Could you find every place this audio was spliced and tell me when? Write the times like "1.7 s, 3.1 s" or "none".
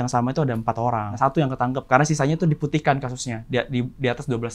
1.1 s